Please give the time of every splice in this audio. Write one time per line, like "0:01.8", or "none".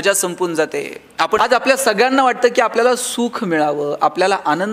0:01.4